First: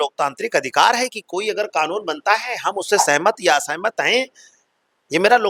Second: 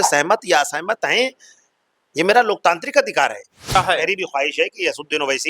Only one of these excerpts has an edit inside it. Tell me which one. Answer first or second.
second